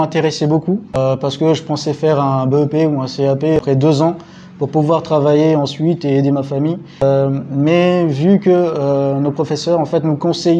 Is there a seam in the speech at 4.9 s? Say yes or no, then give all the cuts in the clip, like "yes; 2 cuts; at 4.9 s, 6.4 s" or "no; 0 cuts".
no; 3 cuts; at 1.0 s, 3.6 s, 7.0 s